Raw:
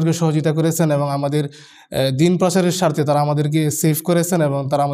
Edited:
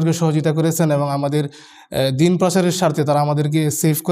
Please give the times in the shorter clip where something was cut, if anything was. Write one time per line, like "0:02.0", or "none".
none